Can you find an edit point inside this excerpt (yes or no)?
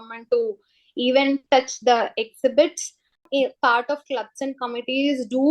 yes